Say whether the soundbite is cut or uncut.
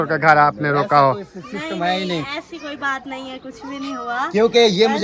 uncut